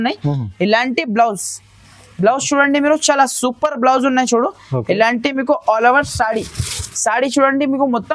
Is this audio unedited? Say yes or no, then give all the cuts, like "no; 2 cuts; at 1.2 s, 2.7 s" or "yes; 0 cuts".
yes; 0 cuts